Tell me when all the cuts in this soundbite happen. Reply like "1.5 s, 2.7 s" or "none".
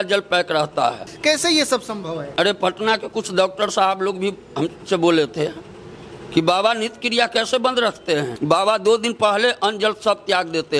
1.1 s, 2.2 s, 8.3 s